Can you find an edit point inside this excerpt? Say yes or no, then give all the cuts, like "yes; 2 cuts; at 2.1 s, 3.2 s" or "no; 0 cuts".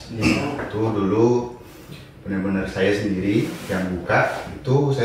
no; 0 cuts